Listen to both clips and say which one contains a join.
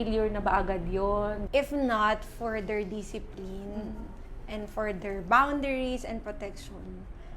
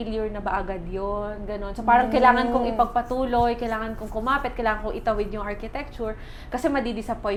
first; 1 cut; at 1.4 s

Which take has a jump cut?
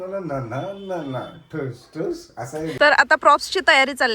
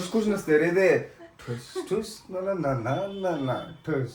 first; 1 cut; at 2.7 s

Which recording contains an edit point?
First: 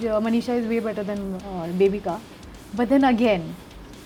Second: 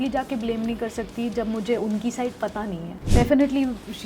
second; 1 cut; at 2.9 s

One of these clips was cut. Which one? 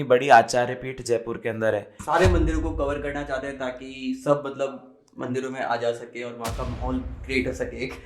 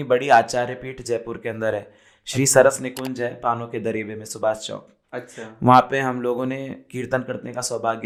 first; 1 cut; at 1.9 s

